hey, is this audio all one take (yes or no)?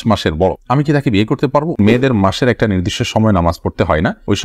no